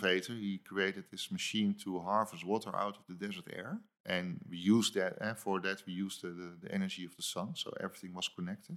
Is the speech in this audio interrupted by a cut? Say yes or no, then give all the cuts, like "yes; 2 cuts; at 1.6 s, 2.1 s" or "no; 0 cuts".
yes; 1 cut; at 3.9 s